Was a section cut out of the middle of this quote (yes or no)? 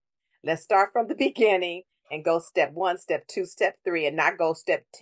no